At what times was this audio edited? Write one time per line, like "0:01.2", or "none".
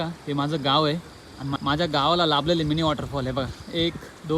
0:01.5